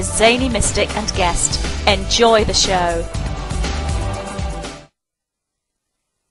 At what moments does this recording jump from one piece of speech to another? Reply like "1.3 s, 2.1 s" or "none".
none